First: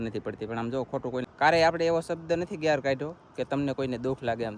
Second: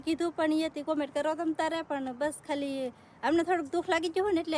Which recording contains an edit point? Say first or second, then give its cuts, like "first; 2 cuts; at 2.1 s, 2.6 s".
first; 1 cut; at 1.2 s